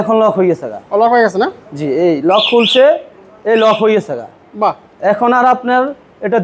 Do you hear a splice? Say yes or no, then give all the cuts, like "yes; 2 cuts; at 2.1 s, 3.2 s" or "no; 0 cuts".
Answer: no; 0 cuts